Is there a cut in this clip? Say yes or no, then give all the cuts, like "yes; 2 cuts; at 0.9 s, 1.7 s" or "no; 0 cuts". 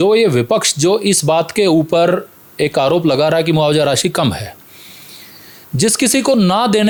no; 0 cuts